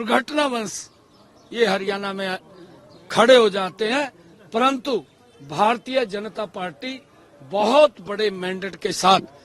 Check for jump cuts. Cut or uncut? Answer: uncut